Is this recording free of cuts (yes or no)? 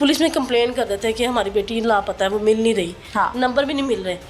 yes